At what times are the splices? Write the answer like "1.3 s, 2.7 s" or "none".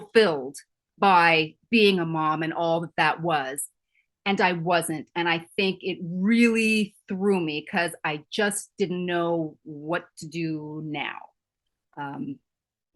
none